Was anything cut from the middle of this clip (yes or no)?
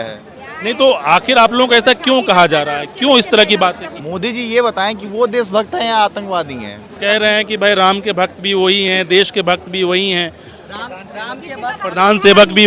yes